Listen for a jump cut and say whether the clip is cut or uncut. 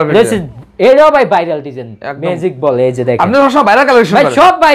uncut